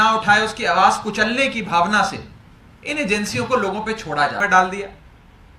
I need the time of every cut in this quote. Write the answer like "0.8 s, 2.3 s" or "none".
4.4 s